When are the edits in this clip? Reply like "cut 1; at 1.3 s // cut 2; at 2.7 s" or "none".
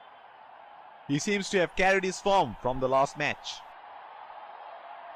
cut 1; at 1.0 s // cut 2; at 3.4 s